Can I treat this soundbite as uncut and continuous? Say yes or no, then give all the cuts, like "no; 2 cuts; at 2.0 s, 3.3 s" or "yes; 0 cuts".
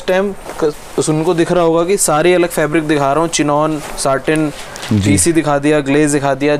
yes; 0 cuts